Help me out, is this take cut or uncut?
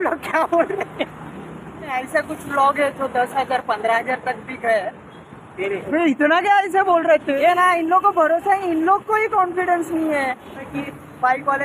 cut